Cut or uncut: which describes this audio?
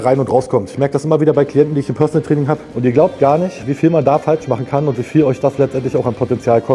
cut